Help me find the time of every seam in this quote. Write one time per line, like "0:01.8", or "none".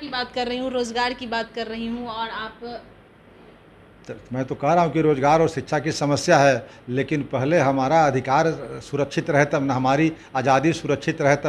none